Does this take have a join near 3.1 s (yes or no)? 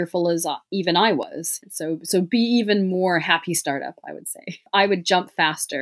no